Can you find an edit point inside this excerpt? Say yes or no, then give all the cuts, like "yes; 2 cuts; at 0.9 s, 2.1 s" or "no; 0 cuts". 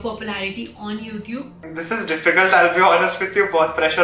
yes; 1 cut; at 1.6 s